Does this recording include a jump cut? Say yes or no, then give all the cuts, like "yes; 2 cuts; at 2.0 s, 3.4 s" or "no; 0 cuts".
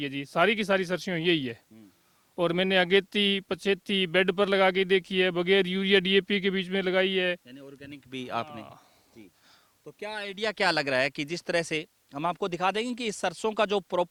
no; 0 cuts